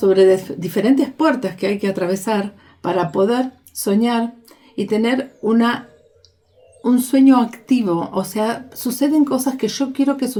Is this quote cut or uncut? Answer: uncut